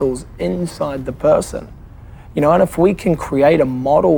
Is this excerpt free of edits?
yes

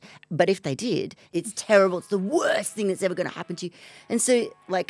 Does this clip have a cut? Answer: yes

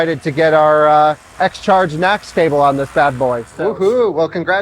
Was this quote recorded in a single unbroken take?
no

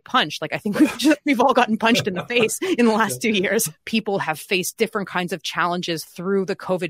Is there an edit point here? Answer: yes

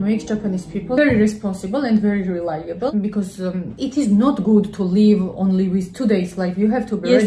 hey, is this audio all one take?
no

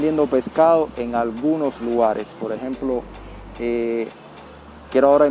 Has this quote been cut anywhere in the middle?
no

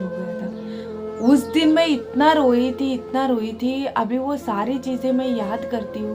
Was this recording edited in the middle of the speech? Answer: no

